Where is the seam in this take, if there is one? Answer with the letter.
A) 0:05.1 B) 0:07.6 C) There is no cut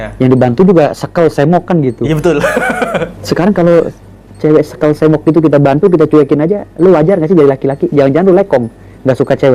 C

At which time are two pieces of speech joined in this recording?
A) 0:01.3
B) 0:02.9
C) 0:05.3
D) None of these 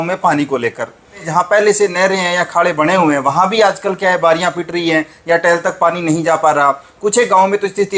A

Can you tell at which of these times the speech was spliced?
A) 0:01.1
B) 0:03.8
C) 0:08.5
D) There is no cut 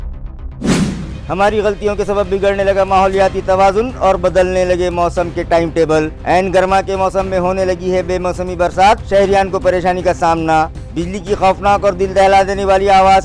A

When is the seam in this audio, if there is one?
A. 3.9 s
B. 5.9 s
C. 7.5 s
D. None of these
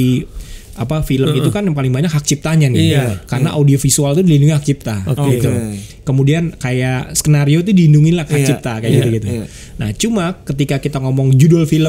D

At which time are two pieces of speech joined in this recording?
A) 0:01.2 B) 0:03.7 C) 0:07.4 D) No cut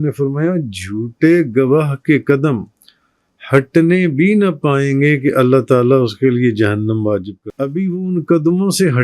C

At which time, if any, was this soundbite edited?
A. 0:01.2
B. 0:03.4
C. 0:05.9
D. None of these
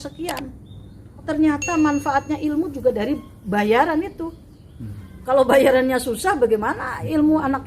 A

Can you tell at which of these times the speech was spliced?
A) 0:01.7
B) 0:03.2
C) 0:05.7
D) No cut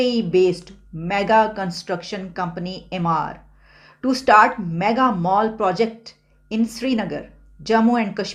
D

